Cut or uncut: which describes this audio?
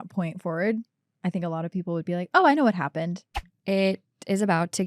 cut